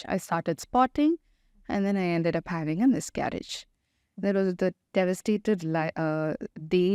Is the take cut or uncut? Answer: uncut